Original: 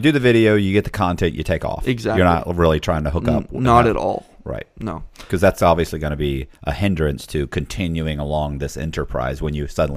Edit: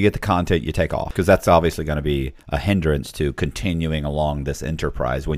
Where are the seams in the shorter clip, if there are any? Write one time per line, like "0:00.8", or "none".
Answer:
0:01.0